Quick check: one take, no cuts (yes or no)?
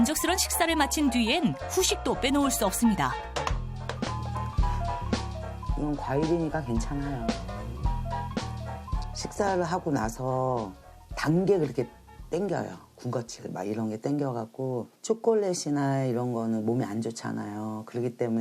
yes